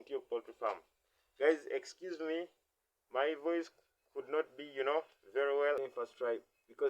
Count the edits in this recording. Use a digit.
1